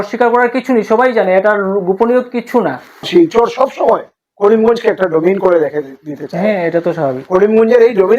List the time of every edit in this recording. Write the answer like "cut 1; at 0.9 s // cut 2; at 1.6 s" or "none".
cut 1; at 3.0 s